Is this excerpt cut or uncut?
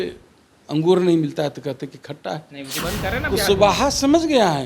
cut